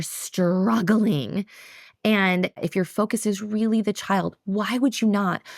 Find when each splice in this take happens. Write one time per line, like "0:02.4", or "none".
0:02.6